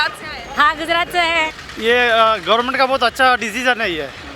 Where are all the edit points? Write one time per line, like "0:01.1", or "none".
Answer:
0:01.6